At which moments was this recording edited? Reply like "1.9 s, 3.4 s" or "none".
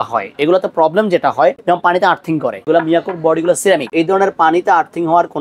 1.6 s, 2.6 s, 3.9 s